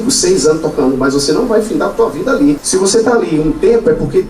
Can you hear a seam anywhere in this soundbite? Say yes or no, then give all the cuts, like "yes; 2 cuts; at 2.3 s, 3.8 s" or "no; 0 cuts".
yes; 1 cut; at 2.6 s